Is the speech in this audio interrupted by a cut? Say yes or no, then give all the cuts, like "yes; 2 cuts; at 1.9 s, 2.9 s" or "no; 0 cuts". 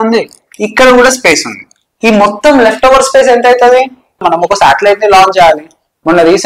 yes; 1 cut; at 4.2 s